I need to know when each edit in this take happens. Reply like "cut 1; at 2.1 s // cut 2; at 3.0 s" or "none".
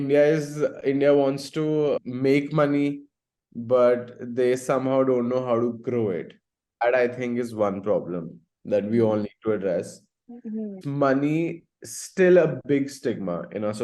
none